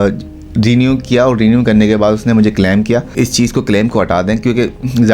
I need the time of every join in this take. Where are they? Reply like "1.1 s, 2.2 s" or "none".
3.1 s